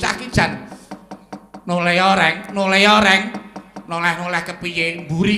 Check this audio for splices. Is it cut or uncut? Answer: uncut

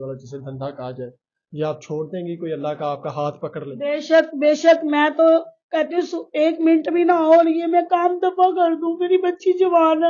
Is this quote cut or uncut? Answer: uncut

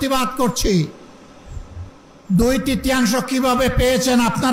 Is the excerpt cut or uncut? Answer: uncut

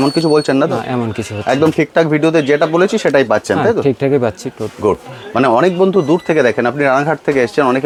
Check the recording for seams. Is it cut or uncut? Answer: uncut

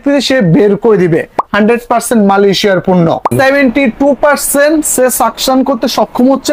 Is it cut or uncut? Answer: cut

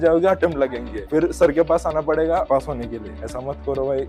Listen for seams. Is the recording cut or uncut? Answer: uncut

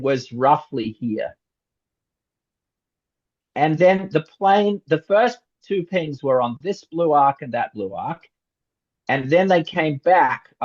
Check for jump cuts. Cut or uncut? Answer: uncut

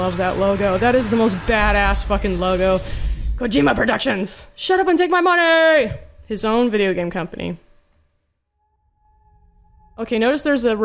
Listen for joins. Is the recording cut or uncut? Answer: uncut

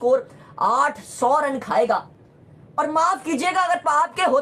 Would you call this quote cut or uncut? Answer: uncut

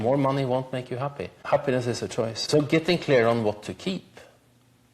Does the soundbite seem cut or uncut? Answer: cut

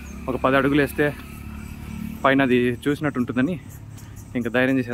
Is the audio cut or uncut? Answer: uncut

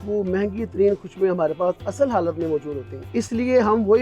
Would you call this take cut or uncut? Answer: cut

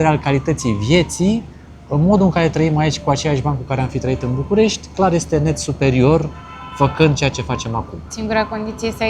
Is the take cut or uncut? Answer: uncut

